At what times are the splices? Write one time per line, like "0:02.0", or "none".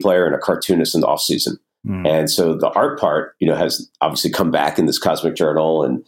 0:02.6